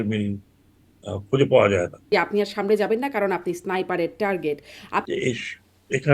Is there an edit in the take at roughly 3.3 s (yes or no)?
no